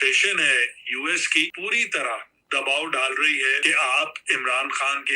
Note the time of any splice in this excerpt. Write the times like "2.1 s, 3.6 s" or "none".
1.5 s, 3.6 s

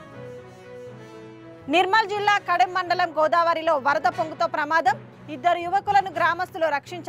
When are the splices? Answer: 1.2 s

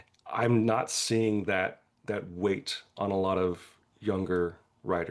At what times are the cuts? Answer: none

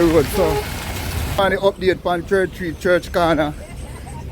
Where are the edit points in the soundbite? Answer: 1.4 s

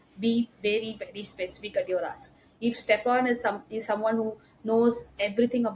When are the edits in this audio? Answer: none

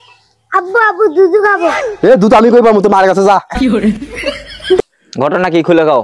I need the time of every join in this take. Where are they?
4.8 s

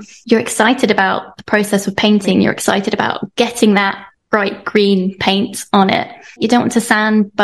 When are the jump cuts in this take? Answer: 6.4 s

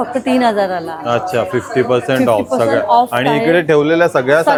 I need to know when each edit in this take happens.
none

